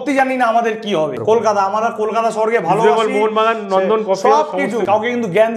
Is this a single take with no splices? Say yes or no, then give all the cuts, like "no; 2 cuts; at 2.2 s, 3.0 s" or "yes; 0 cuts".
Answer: no; 2 cuts; at 1.2 s, 4.8 s